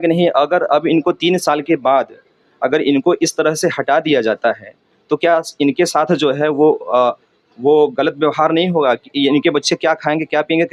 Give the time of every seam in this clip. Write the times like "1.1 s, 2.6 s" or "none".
none